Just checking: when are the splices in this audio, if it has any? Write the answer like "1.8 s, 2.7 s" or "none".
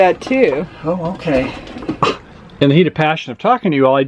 1.9 s